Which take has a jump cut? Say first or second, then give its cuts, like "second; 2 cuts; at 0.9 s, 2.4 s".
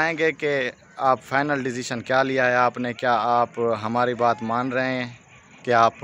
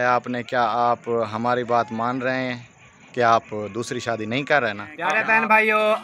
second; 1 cut; at 5.0 s